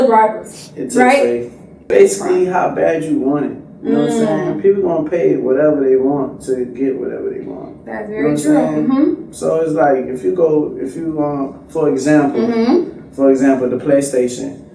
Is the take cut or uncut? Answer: cut